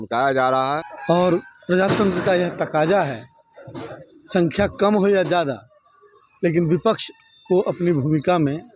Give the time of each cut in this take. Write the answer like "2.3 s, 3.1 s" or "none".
0.9 s